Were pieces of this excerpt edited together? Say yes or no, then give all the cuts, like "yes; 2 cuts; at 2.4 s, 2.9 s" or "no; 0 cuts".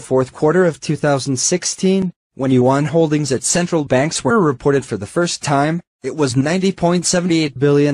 no; 0 cuts